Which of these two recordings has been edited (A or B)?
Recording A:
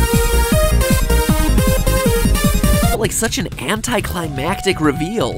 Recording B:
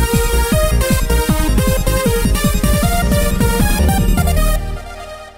B